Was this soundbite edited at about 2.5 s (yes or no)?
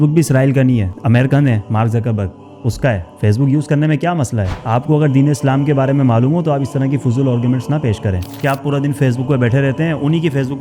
no